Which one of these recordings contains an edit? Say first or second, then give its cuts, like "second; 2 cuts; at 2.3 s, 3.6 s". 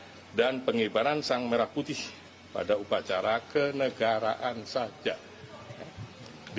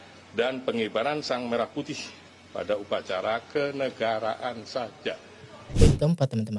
second; 1 cut; at 5.7 s